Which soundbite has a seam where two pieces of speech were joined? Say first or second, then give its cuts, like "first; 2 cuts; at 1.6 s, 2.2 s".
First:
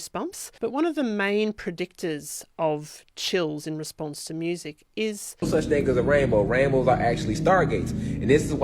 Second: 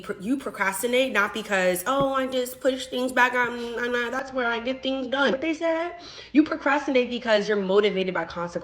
first; 1 cut; at 5.4 s